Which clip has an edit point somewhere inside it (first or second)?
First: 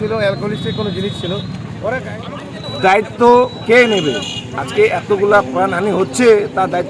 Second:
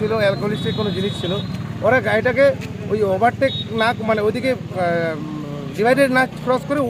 first